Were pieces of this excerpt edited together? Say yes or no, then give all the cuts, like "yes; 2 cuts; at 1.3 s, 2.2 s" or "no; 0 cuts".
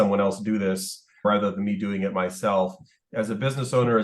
yes; 1 cut; at 3.1 s